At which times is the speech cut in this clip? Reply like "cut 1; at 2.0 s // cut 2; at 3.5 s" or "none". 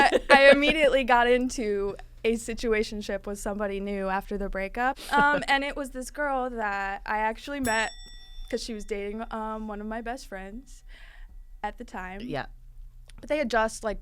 cut 1; at 5.0 s